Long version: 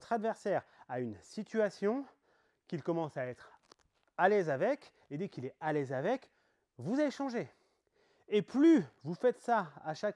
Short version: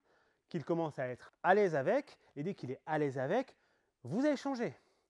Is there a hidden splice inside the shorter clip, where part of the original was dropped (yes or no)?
yes